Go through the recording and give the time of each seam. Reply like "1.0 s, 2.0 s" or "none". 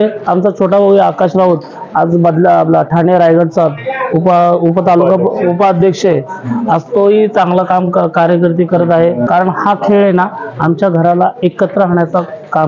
9.3 s